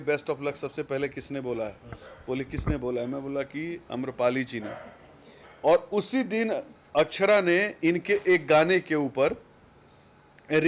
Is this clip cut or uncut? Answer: uncut